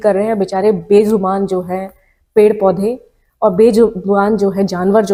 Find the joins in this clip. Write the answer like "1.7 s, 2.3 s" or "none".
none

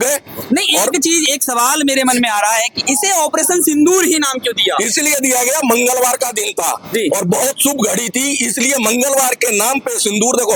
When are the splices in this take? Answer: none

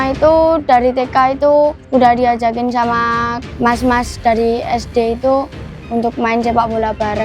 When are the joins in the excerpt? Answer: 1.8 s, 3.4 s

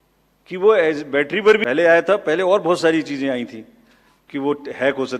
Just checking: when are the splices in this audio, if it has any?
1.6 s

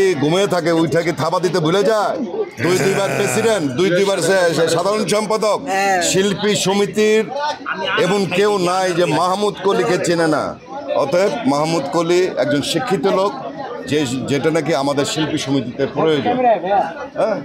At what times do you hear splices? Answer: none

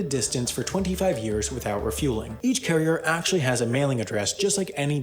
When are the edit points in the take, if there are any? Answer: 2.3 s

